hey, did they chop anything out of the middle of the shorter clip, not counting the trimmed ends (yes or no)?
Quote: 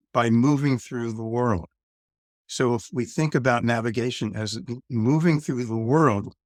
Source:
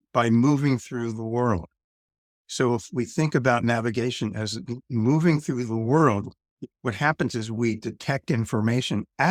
no